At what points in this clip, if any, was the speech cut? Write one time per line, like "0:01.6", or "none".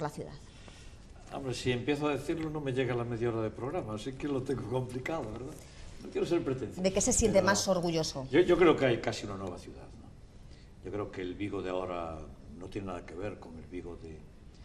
0:11.5